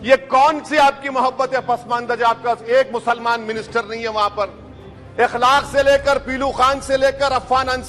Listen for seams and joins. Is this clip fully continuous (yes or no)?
yes